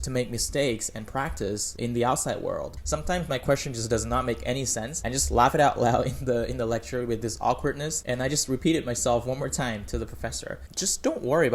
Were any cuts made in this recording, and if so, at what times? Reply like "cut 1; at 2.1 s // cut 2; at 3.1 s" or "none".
cut 1; at 1.7 s // cut 2; at 2.7 s // cut 3; at 5.0 s // cut 4; at 7.9 s // cut 5; at 10.7 s